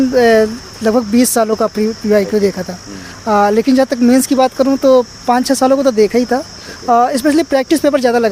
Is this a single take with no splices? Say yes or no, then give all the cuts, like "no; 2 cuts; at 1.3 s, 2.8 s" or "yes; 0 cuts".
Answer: yes; 0 cuts